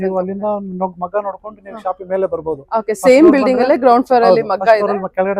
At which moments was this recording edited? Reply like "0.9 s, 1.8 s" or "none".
none

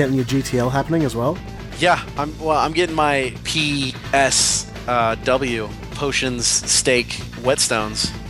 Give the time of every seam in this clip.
3.6 s, 5.8 s, 7.2 s

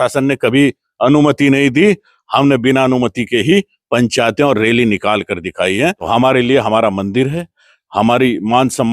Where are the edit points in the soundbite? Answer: 6.1 s

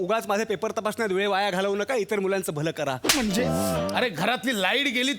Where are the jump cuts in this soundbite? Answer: 3.9 s

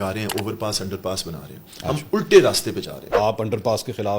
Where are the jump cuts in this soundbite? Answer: 3.2 s

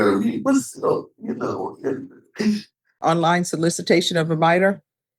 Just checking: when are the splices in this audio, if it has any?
3.0 s

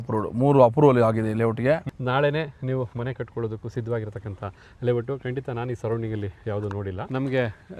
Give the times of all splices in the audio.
1.9 s, 7.0 s

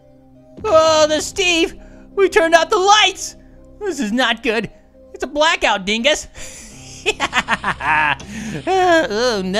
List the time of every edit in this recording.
none

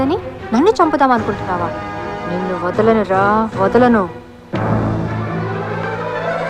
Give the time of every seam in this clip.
none

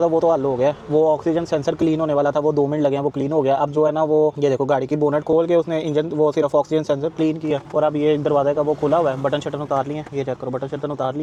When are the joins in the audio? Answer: none

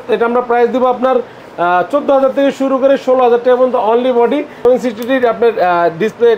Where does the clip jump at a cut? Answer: 4.6 s

